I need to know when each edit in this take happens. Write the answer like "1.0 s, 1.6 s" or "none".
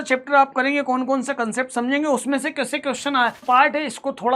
3.4 s